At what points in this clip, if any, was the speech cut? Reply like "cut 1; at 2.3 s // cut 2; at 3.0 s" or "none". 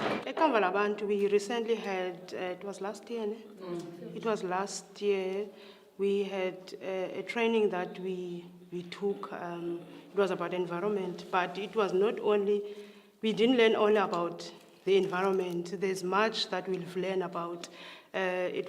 cut 1; at 12.0 s

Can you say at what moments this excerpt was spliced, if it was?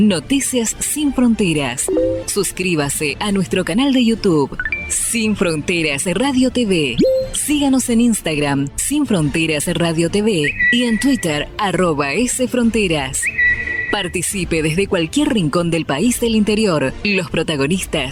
none

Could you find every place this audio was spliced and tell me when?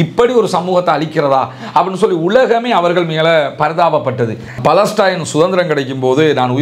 cut 1; at 4.5 s

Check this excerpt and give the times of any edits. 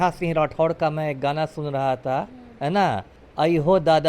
cut 1; at 3.2 s

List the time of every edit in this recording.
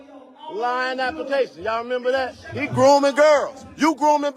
cut 1; at 2.4 s

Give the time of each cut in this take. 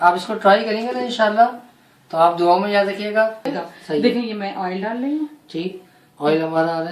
cut 1; at 3.6 s

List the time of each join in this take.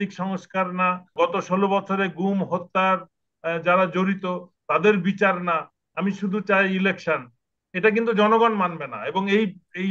cut 1; at 1.1 s

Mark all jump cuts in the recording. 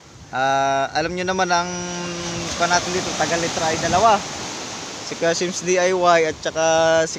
none

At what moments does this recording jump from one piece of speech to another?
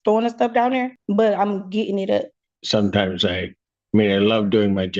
cut 1; at 1.0 s // cut 2; at 2.5 s

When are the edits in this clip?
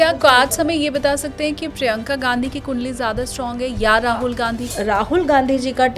cut 1; at 4.6 s

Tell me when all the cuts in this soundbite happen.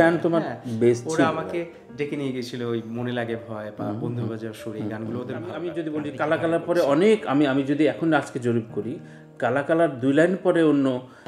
cut 1; at 5.6 s

